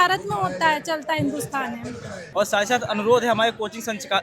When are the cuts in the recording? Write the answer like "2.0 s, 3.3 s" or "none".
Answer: 2.1 s

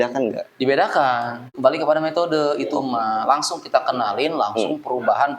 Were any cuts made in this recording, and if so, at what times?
1.4 s

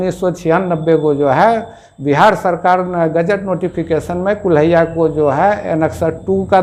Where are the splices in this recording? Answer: none

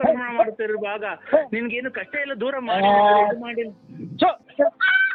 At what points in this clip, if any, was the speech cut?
none

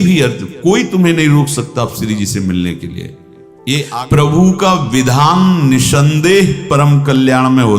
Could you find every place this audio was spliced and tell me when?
3.9 s

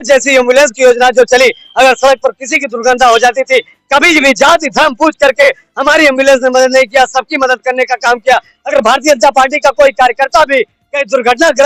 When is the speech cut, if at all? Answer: none

